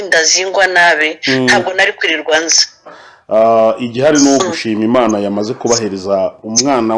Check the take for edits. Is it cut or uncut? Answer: cut